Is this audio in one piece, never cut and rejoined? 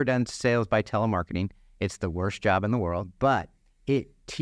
no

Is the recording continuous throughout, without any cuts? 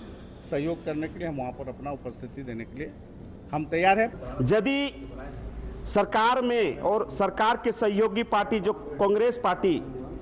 no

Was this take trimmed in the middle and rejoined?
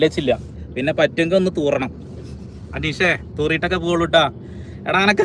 yes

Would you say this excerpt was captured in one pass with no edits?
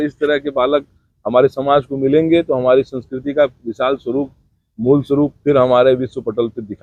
yes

